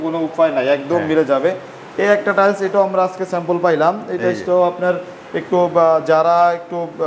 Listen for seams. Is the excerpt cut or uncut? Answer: uncut